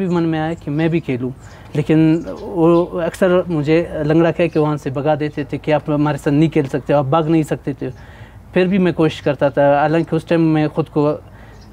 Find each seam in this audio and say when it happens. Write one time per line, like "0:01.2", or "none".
none